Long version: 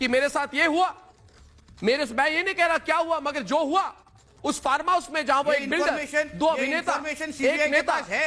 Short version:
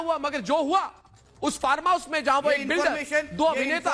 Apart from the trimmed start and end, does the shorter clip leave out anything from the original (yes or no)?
no